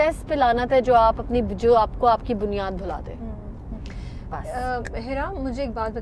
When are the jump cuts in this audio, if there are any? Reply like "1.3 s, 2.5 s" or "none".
none